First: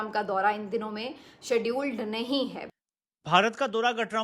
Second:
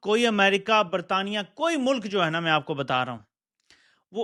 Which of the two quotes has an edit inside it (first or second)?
first